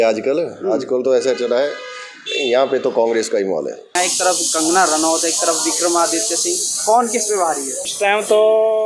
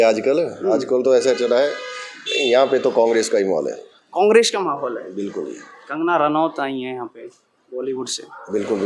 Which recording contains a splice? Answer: first; 2 cuts; at 3.9 s, 7.9 s

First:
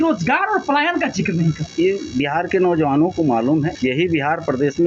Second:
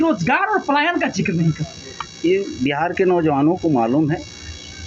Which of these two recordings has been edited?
first; 2 cuts; at 1.6 s, 3.7 s

